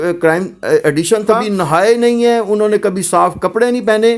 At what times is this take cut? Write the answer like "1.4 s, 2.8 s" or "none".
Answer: 1.4 s